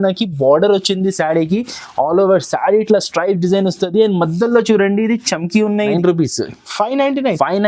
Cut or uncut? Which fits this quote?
cut